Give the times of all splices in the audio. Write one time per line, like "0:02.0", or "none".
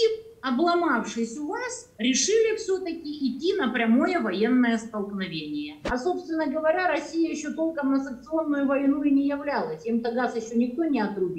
0:05.8